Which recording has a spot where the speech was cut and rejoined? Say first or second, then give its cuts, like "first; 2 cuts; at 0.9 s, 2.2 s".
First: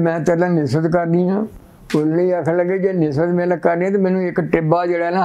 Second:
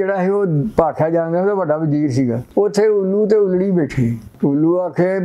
second; 2 cuts; at 2.4 s, 4.2 s